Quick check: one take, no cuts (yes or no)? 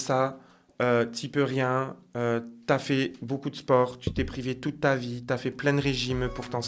yes